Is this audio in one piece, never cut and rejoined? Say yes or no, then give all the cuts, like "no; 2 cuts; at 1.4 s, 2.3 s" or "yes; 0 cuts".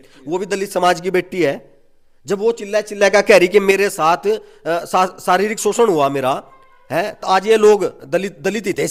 yes; 0 cuts